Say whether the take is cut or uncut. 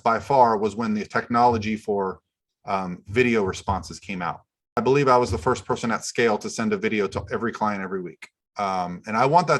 cut